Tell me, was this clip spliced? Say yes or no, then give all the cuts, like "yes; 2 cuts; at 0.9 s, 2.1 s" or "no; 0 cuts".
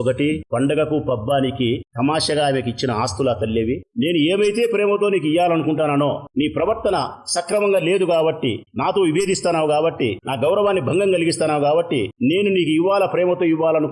yes; 1 cut; at 3.9 s